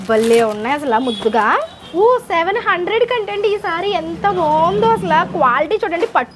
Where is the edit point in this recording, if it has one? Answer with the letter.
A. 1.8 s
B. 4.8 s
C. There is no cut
A